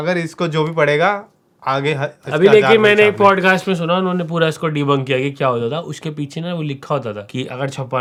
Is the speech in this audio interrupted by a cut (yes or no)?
no